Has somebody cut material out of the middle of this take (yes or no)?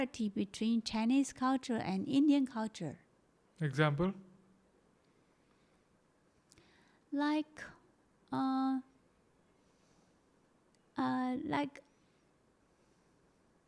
no